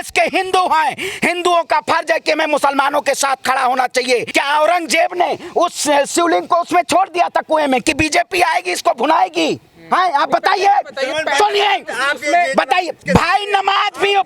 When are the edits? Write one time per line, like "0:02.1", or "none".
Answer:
0:04.3
0:13.0